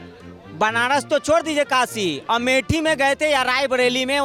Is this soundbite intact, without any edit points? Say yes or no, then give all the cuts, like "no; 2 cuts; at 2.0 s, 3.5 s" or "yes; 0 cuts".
yes; 0 cuts